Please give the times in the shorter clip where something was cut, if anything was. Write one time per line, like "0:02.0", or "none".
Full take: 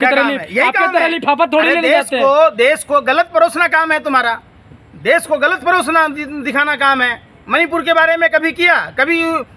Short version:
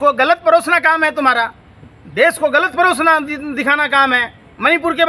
none